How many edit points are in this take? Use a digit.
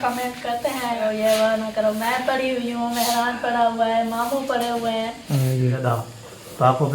2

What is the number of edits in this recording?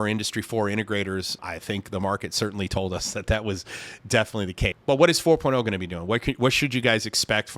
2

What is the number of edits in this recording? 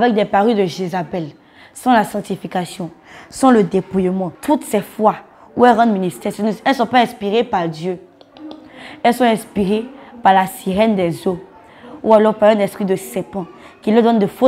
1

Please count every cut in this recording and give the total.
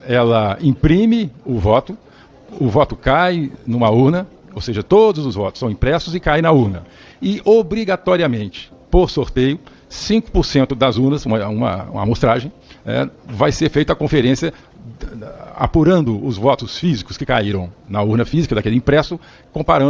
0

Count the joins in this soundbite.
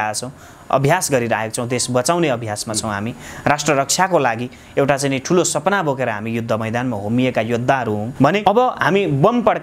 1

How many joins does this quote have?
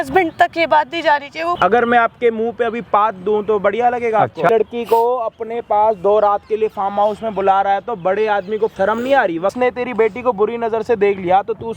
4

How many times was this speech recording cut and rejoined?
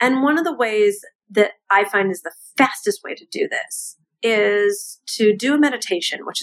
1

